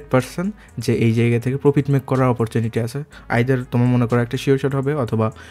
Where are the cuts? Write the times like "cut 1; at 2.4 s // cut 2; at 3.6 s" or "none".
none